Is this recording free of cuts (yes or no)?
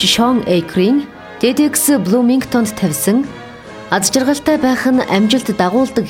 no